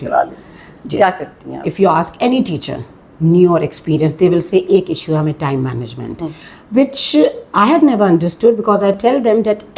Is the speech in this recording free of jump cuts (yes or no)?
yes